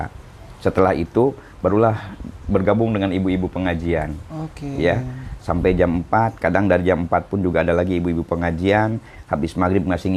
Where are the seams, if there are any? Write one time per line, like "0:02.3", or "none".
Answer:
none